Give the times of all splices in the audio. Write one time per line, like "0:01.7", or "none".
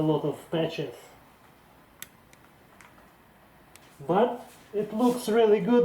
0:01.3
0:03.9
0:04.5